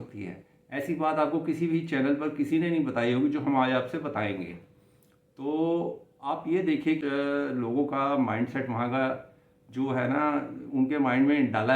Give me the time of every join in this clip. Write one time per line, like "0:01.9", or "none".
0:07.0